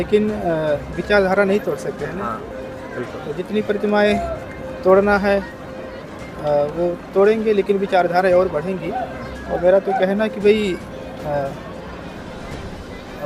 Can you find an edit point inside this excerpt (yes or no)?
no